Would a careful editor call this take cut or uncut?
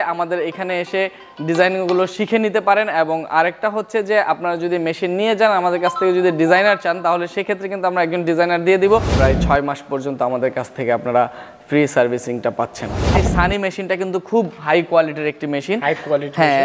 cut